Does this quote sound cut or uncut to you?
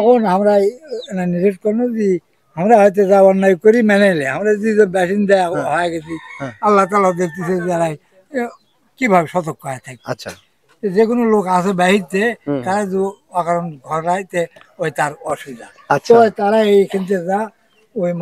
uncut